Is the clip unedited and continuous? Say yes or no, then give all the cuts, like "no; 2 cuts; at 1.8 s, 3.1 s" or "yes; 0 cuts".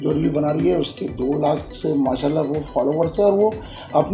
yes; 0 cuts